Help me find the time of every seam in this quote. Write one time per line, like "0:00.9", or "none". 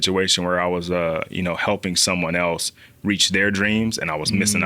none